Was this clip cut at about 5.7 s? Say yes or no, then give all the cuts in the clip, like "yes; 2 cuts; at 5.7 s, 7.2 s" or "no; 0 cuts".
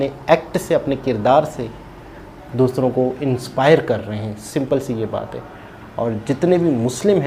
no; 0 cuts